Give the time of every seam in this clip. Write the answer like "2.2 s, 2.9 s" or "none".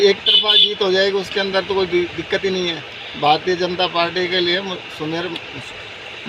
none